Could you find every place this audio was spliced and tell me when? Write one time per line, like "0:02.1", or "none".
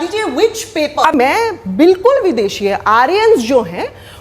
0:01.1

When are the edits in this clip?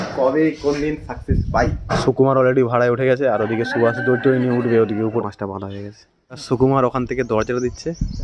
0:01.9
0:05.2
0:06.4

